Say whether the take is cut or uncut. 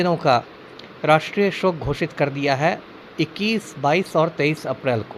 uncut